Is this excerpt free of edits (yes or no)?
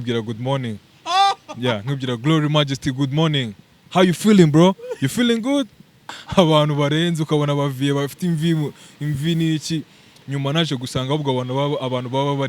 no